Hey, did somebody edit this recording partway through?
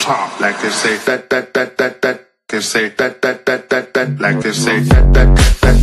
no; 0 cuts

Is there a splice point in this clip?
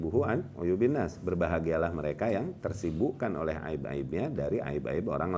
no; 0 cuts

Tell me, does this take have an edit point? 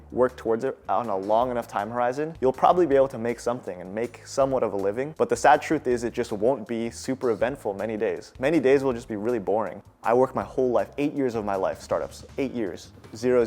yes; 1 cut; at 9.8 s

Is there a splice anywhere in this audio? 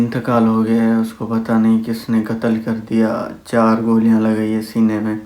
no; 0 cuts

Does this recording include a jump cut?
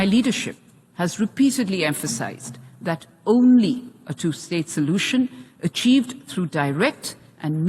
no; 0 cuts

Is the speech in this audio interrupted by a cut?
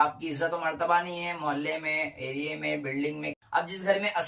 yes; 1 cut; at 3.3 s

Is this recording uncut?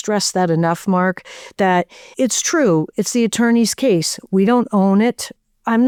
yes; 0 cuts

